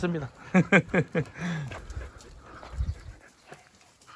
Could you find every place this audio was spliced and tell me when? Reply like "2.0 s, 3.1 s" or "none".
1.7 s